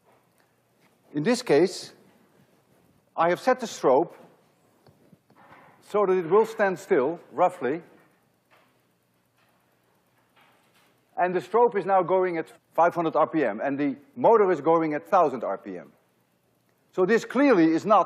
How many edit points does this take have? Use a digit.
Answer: 1